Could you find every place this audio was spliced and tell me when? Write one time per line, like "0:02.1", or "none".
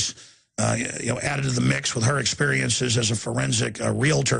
none